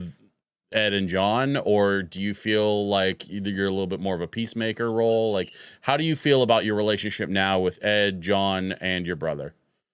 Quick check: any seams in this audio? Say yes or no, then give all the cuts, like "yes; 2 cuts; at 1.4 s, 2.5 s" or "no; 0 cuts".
no; 0 cuts